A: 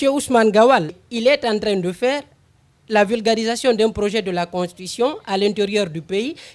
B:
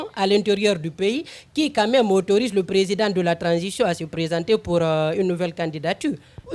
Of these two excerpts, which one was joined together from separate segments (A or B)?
A